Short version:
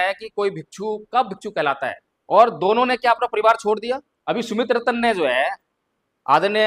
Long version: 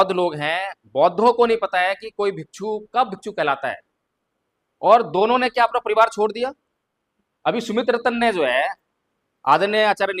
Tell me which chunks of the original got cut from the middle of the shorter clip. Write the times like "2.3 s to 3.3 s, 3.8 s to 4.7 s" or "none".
3.9 s to 4.6 s, 6.6 s to 7.3 s